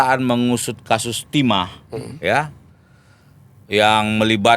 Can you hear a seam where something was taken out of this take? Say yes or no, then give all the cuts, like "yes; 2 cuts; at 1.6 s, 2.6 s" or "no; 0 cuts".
no; 0 cuts